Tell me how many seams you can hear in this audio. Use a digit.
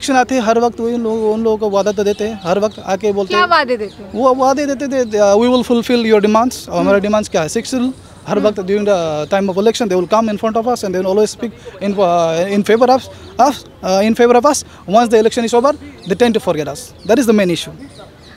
0